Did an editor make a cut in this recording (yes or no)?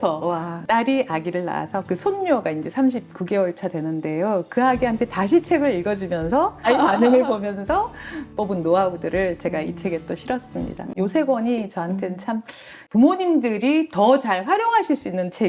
no